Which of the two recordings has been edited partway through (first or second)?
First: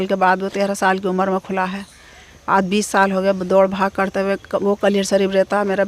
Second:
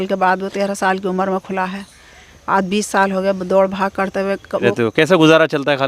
second